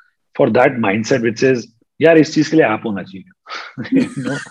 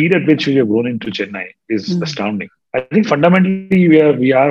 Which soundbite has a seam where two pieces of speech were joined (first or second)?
second